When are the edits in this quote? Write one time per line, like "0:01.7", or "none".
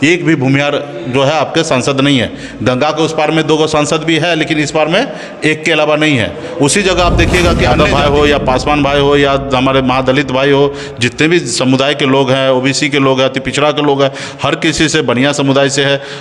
0:07.7